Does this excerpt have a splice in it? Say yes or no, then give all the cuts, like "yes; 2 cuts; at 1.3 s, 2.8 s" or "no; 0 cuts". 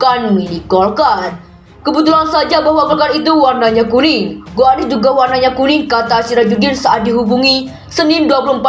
no; 0 cuts